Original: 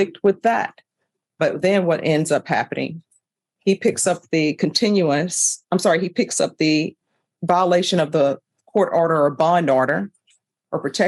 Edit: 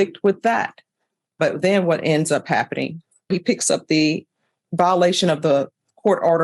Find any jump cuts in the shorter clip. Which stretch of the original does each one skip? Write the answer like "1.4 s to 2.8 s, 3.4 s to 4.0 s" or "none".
3.3 s to 6.0 s